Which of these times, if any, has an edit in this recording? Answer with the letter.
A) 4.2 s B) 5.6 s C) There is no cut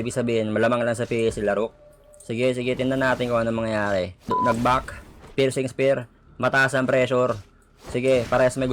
A